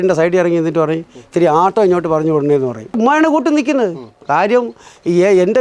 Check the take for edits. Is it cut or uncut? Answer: cut